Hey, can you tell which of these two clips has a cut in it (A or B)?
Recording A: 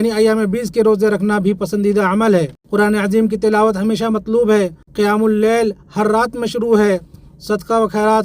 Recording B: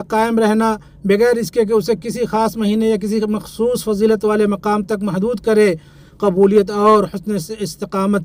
A